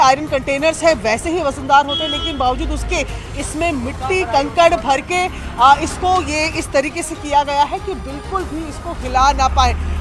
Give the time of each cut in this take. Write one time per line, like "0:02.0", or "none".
none